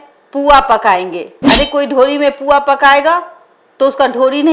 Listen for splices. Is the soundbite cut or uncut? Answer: uncut